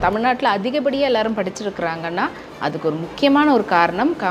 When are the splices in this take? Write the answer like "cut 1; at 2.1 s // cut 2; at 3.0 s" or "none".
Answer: none